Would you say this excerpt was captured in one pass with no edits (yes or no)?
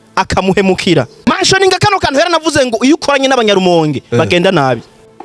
no